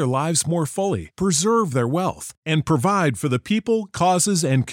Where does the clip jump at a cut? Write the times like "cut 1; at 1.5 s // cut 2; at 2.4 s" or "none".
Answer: none